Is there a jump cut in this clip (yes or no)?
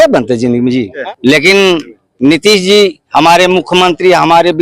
yes